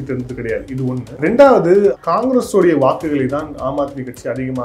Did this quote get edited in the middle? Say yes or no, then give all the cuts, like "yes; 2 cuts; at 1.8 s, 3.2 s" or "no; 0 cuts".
yes; 2 cuts; at 1.1 s, 2.0 s